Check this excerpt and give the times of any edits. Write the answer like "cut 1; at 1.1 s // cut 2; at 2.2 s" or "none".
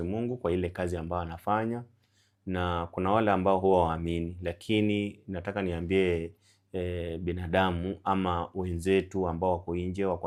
none